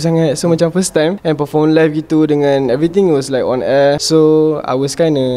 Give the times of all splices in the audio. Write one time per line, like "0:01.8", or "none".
none